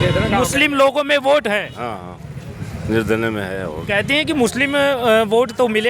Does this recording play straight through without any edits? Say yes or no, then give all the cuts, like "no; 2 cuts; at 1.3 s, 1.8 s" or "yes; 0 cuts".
yes; 0 cuts